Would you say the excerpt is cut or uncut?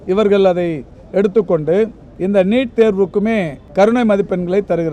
cut